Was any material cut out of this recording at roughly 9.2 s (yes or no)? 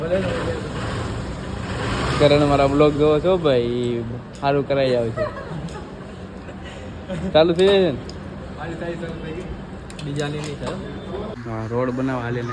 no